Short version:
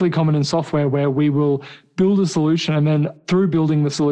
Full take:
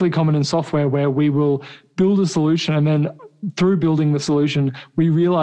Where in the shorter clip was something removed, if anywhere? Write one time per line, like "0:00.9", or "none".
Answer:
0:03.2